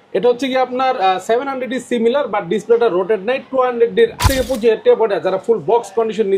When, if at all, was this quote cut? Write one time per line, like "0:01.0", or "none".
0:04.2